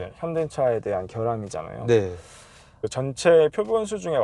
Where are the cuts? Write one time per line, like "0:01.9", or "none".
0:02.9